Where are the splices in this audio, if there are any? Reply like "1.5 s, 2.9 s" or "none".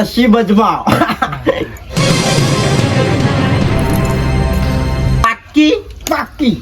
5.2 s

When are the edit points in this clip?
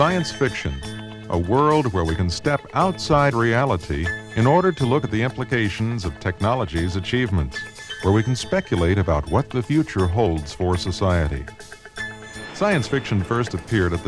none

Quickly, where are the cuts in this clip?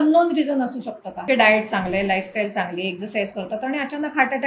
1.3 s

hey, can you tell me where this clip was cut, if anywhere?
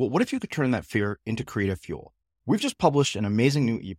none

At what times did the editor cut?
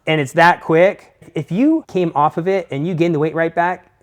1.3 s, 1.9 s

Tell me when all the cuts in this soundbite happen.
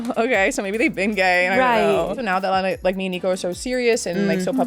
2.2 s

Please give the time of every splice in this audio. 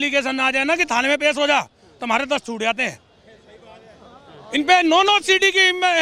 none

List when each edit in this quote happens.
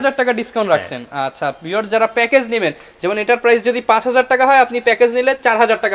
none

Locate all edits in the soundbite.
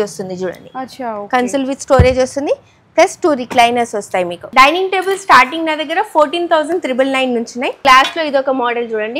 4.4 s, 7.8 s

